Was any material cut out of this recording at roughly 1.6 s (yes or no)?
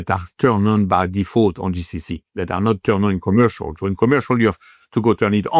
no